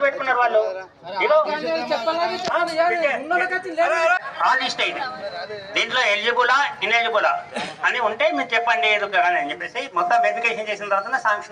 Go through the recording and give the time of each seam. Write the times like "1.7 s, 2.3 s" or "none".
4.3 s